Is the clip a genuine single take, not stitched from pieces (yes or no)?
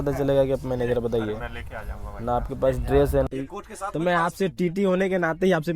no